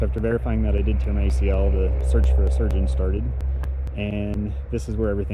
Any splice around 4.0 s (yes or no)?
no